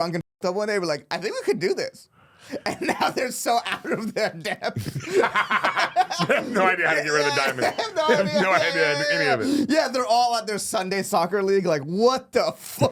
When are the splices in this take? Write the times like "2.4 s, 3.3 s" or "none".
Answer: none